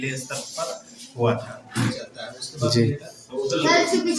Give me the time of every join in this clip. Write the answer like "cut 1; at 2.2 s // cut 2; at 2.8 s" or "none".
cut 1; at 2.0 s

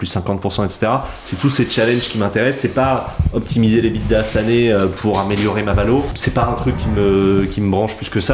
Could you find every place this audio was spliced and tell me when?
cut 1; at 6.2 s

